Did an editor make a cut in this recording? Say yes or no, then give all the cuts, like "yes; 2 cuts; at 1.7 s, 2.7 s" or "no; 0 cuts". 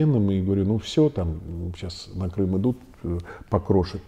no; 0 cuts